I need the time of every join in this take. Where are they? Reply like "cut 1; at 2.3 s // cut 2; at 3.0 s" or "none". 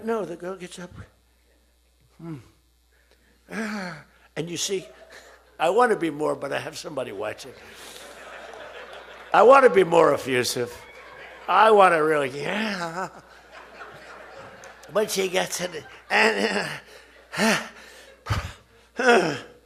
none